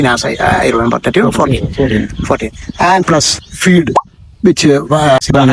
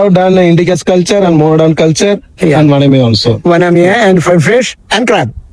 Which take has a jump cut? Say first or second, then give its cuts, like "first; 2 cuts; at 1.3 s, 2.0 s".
first; 1 cut; at 3.0 s